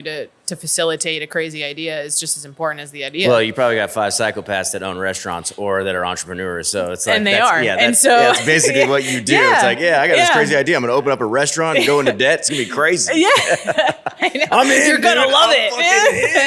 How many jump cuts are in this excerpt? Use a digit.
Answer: 0